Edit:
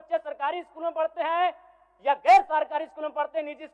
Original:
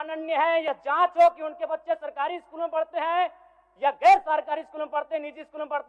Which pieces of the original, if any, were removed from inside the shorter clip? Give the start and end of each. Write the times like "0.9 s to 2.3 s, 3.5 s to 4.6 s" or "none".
none